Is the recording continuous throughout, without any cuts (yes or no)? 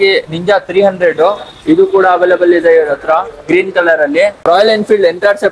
no